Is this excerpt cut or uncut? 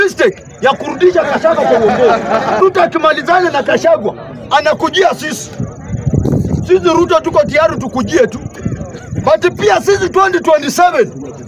cut